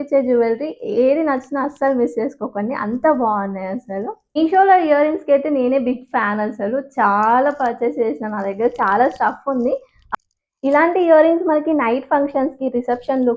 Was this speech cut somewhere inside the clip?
yes; 2 cuts; at 4.4 s, 10.0 s

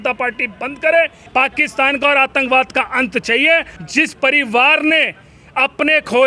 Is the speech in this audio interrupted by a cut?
yes; 2 cuts; at 1.2 s, 3.7 s

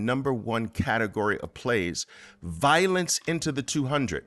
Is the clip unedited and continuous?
yes; 0 cuts

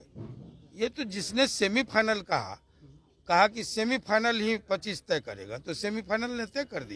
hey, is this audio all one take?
yes; 0 cuts

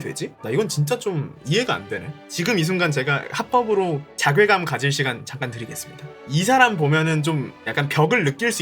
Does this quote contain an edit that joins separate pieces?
yes; 1 cut; at 2.2 s

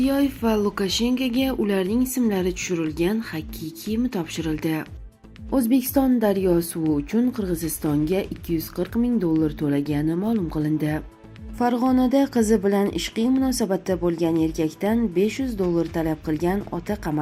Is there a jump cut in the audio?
yes; 2 cuts; at 5.0 s, 11.1 s

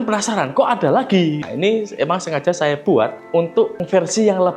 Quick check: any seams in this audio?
yes; 2 cuts; at 1.5 s, 3.2 s

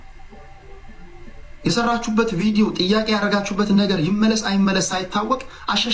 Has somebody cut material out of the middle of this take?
no; 0 cuts

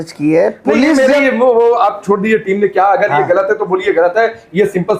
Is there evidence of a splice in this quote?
no; 0 cuts

